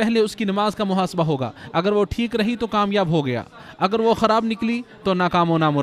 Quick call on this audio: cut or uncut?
uncut